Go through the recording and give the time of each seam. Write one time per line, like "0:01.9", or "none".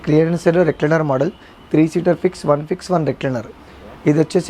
none